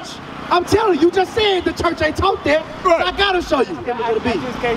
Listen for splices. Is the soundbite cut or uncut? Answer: cut